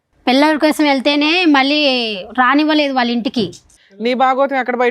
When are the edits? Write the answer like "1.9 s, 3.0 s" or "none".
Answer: 3.7 s